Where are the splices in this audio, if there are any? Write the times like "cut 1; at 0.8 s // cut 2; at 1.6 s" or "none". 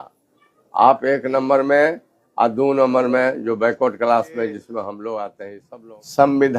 cut 1; at 5.6 s